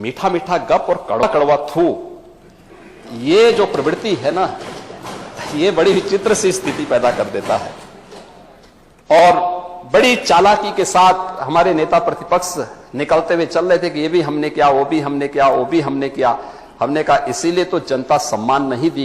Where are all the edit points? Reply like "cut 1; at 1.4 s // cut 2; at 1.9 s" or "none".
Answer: cut 1; at 1.2 s